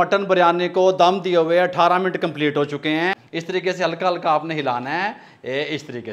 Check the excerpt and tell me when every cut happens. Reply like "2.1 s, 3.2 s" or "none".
3.2 s